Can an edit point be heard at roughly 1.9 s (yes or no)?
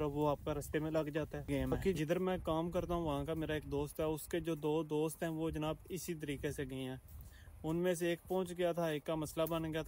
yes